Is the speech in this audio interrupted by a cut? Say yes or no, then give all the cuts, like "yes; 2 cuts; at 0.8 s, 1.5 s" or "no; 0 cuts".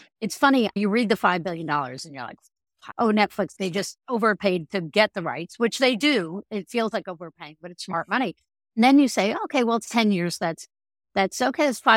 yes; 3 cuts; at 0.8 s, 2.8 s, 3.5 s